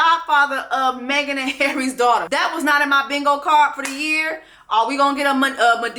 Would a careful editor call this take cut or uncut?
cut